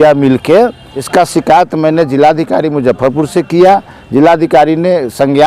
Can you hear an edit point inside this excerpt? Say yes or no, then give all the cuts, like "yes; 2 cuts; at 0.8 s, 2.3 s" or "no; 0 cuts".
yes; 1 cut; at 0.9 s